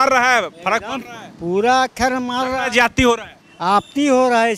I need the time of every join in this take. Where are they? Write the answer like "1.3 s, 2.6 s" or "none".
none